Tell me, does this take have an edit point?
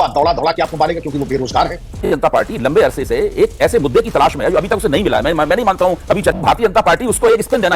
yes; 2 cuts; at 2.0 s, 6.4 s

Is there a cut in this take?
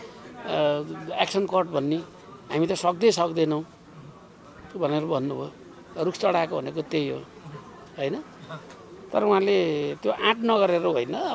no; 0 cuts

